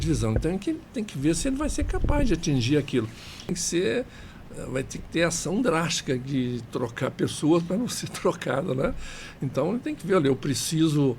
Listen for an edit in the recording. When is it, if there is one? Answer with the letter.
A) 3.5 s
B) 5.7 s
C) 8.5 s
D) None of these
A